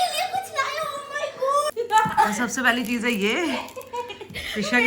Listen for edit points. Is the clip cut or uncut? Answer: cut